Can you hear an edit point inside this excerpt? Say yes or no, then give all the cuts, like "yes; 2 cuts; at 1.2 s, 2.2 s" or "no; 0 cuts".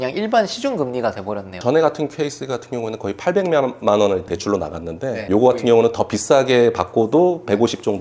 yes; 2 cuts; at 1.5 s, 4.2 s